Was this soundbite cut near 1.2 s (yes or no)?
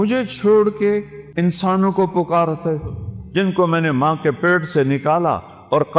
yes